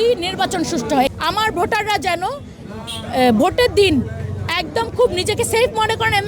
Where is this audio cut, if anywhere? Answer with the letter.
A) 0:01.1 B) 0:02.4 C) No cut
A